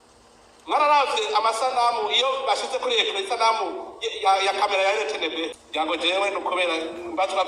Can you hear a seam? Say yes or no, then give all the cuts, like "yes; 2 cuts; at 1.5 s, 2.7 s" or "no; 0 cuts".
yes; 1 cut; at 5.5 s